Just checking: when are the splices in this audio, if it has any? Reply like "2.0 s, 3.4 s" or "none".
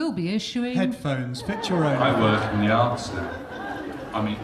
2.0 s